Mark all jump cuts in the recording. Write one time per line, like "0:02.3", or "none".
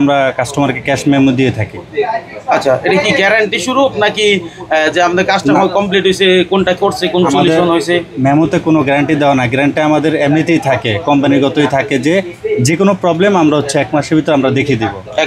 none